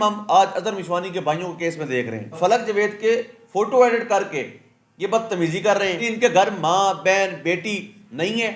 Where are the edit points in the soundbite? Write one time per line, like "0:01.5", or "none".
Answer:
0:02.4
0:06.1

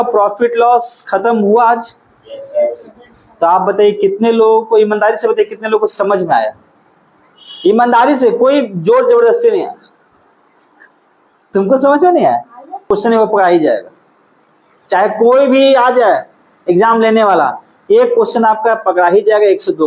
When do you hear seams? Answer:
0:12.9

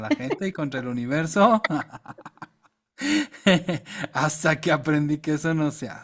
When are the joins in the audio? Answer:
none

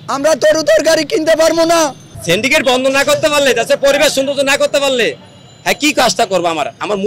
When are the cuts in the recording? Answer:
0:02.1

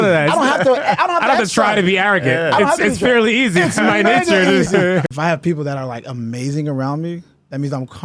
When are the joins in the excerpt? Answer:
0:05.1

